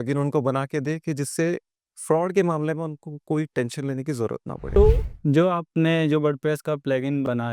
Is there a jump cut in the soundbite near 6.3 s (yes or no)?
no